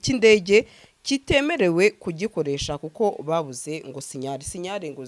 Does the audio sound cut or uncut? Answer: uncut